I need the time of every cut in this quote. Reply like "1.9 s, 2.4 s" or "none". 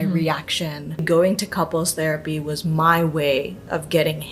1.0 s